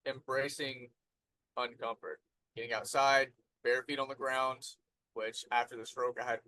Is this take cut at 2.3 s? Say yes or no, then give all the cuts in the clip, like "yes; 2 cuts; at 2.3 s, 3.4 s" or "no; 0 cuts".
yes; 1 cut; at 2.3 s